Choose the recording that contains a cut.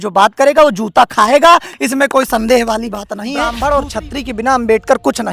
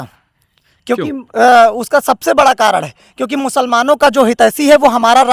first; 1 cut; at 3.5 s

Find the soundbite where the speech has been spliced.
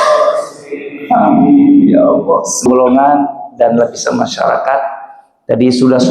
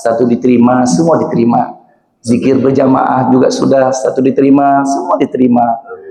first; 1 cut; at 2.7 s

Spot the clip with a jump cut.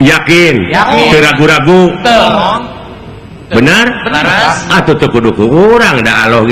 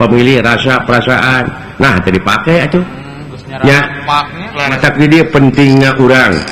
second; 1 cut; at 4.8 s

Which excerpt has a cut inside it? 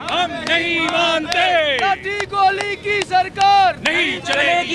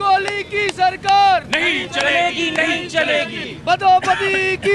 second; 1 cut; at 3.4 s

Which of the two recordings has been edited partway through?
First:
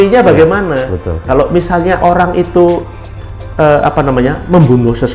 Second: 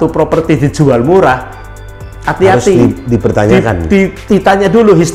first; 1 cut; at 1.3 s

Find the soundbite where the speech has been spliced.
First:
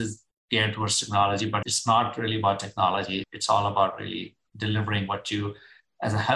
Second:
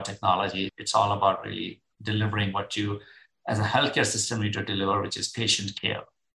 first; 1 cut; at 1.6 s

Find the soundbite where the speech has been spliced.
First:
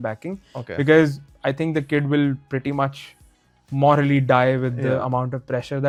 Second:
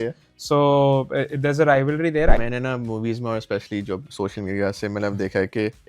second; 1 cut; at 2.4 s

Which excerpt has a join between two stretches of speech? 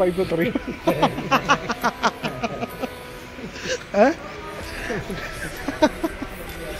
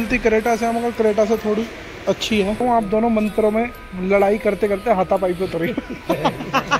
second; 1 cut; at 2.6 s

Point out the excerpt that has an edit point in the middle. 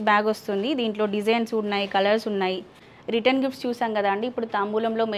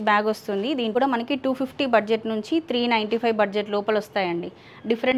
second; 1 cut; at 0.9 s

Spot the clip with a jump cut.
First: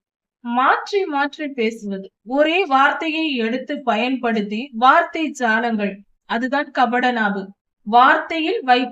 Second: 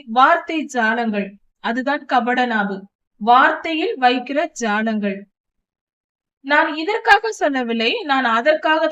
first; 1 cut; at 2.1 s

